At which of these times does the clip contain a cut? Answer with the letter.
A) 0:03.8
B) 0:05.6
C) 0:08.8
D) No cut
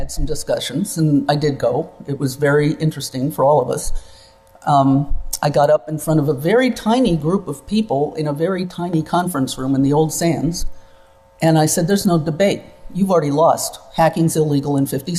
B